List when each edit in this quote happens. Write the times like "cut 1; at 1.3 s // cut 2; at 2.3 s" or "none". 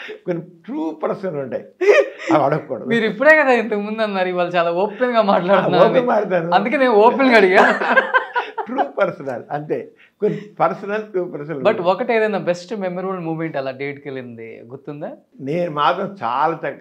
none